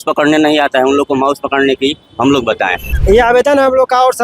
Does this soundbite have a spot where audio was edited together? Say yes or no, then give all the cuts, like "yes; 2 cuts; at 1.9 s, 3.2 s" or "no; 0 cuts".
yes; 1 cut; at 2.5 s